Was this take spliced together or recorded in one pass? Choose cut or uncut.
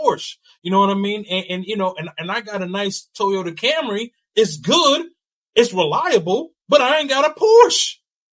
uncut